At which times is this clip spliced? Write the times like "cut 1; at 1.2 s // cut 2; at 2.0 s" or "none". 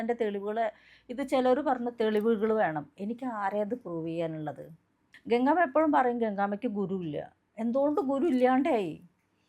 cut 1; at 5.1 s